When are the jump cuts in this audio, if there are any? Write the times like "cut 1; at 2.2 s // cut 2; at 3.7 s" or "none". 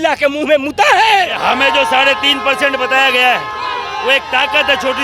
cut 1; at 1.4 s